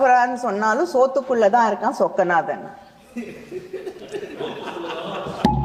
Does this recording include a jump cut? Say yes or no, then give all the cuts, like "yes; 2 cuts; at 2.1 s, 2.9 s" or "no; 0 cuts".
no; 0 cuts